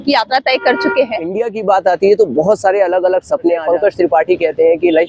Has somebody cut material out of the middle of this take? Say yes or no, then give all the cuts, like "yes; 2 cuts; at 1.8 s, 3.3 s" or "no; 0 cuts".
yes; 2 cuts; at 1.4 s, 3.6 s